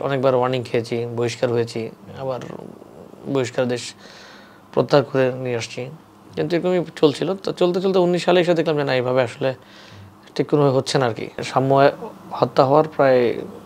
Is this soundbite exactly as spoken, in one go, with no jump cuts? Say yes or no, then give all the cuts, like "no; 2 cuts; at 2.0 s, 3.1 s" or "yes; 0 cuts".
no; 1 cut; at 11.4 s